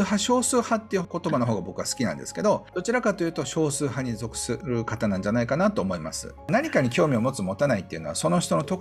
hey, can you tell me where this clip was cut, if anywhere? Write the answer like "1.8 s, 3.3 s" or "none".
1.1 s, 2.7 s, 4.6 s, 6.5 s